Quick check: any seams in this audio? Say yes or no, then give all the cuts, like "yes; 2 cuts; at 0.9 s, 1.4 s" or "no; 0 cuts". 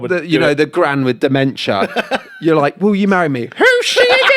no; 0 cuts